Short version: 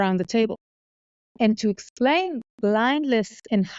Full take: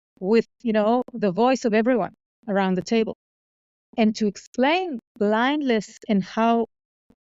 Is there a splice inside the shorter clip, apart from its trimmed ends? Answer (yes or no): no